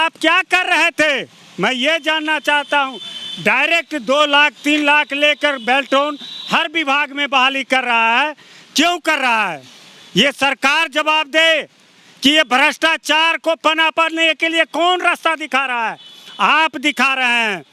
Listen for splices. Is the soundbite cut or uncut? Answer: uncut